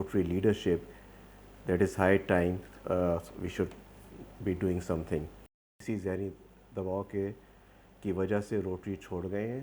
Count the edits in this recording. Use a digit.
1